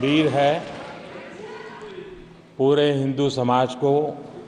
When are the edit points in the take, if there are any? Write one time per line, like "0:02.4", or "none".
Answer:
none